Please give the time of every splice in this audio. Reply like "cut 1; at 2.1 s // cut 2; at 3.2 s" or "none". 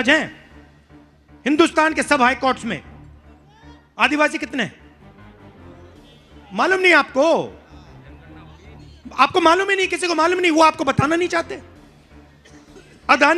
cut 1; at 4.7 s // cut 2; at 6.4 s